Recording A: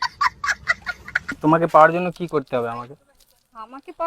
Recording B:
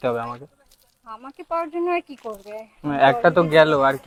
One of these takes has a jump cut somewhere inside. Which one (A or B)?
A